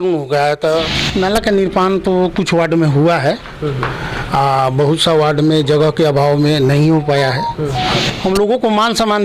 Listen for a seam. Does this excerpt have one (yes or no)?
yes